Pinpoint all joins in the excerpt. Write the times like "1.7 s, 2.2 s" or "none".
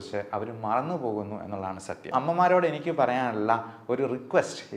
2.1 s